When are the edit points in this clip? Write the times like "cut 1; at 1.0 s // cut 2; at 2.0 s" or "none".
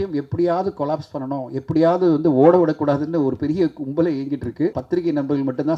cut 1; at 4.8 s

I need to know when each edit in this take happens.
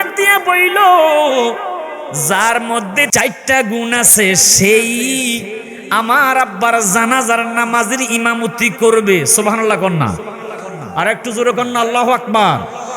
cut 1; at 3.1 s

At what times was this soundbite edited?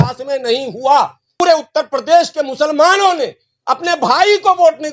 cut 1; at 1.4 s

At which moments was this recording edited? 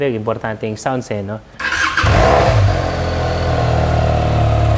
cut 1; at 1.5 s

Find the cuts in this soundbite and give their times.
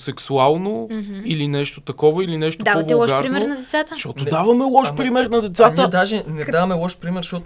none

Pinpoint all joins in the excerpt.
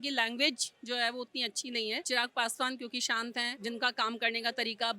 cut 1; at 2.0 s // cut 2; at 3.5 s

